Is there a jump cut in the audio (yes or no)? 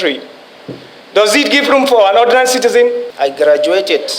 yes